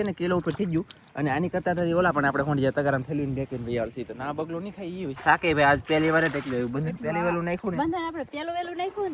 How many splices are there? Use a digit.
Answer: 1